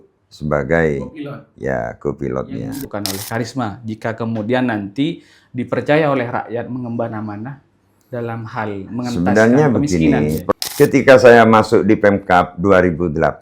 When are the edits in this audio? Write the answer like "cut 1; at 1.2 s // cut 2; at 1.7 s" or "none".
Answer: cut 1; at 2.9 s // cut 2; at 10.4 s